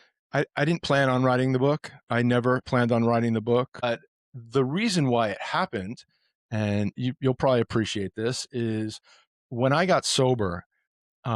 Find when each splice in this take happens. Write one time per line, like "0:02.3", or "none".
0:03.9